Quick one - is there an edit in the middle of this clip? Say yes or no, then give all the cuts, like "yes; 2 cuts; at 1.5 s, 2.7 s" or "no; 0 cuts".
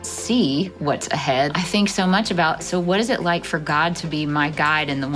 yes; 1 cut; at 1.5 s